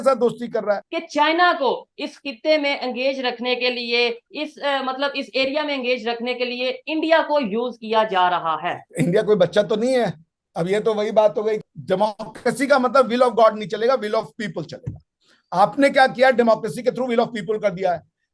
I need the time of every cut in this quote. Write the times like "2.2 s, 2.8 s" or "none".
0.9 s, 11.6 s